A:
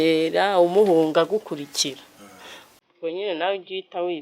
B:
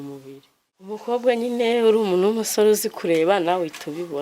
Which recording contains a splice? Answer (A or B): B